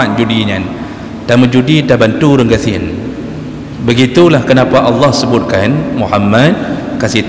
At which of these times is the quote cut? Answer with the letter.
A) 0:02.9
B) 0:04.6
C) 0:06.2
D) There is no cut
D